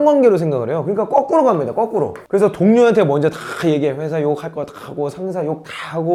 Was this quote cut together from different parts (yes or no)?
no